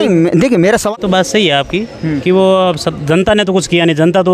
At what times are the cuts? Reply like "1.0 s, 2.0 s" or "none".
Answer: 0.9 s